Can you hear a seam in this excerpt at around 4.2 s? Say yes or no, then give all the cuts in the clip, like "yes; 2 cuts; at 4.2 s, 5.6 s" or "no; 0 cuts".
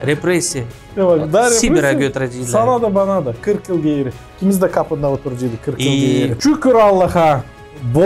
yes; 2 cuts; at 4.2 s, 6.4 s